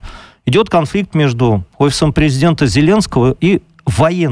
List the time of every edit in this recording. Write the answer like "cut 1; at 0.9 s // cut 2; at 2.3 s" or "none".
none

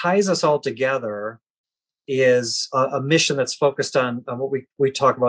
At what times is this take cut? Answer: cut 1; at 2.6 s

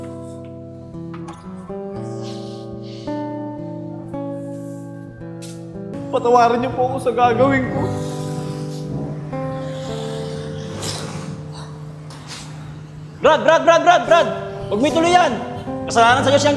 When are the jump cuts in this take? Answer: cut 1; at 5.9 s

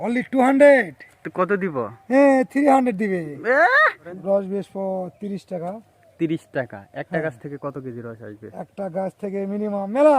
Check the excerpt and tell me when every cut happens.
cut 1; at 4.1 s

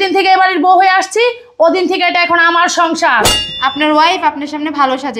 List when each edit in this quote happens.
cut 1; at 3.4 s

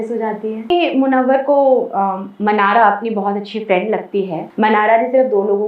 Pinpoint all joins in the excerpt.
cut 1; at 0.7 s // cut 2; at 4.4 s

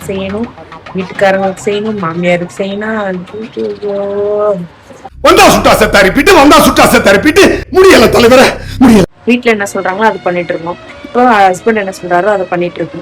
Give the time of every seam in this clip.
cut 1; at 9.2 s

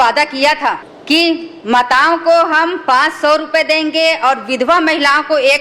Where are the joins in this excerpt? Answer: cut 1; at 0.9 s

